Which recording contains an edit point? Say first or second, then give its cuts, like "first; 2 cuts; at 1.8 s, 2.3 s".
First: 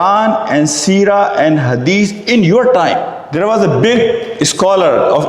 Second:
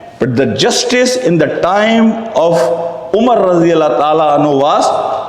first; 1 cut; at 3.2 s